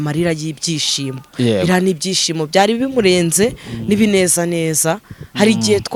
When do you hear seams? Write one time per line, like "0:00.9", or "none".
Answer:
none